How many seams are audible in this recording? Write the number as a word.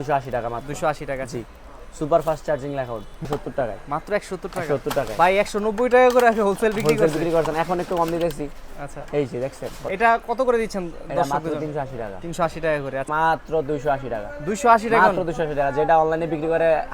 three